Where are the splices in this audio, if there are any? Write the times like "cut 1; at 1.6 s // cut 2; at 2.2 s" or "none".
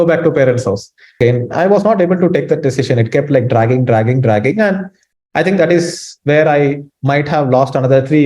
cut 1; at 1.2 s